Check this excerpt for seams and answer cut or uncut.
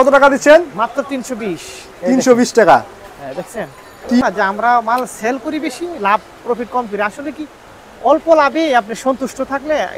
cut